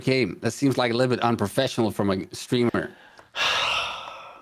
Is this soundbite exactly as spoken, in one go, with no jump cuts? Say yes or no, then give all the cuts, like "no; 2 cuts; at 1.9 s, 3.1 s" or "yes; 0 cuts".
yes; 0 cuts